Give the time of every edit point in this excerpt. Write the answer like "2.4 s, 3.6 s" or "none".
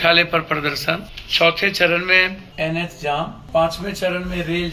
1.2 s, 2.4 s, 3.4 s

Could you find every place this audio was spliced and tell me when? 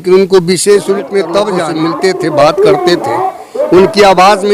1.7 s

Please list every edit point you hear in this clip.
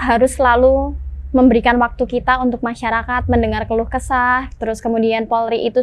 none

